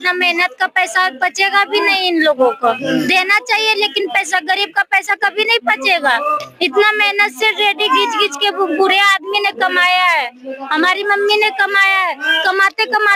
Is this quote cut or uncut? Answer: uncut